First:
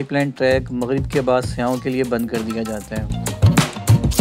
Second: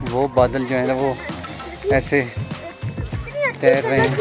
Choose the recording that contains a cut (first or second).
first